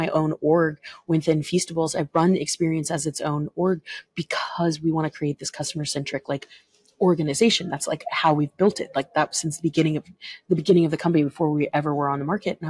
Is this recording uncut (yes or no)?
yes